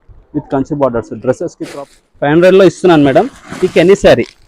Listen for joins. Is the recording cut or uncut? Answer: cut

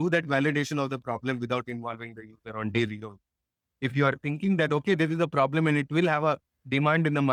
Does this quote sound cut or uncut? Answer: uncut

